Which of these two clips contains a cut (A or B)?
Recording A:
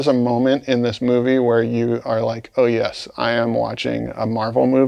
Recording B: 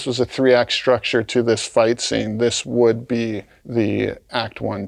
B